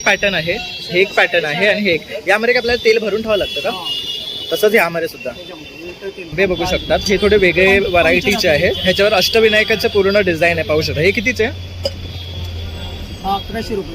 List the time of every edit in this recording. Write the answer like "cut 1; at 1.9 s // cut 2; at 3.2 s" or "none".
cut 1; at 6.3 s